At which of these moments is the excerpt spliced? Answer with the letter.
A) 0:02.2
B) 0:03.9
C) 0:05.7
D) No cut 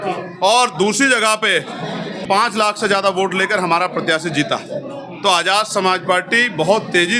A